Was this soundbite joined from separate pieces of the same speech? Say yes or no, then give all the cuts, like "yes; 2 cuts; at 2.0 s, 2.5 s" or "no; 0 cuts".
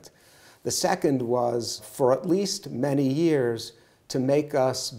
yes; 1 cut; at 1.8 s